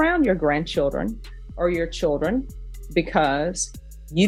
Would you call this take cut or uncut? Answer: uncut